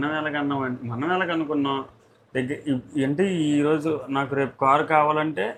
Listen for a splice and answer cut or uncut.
uncut